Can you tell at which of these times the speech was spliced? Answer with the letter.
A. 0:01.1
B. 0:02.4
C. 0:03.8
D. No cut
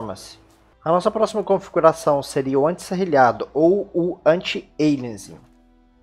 C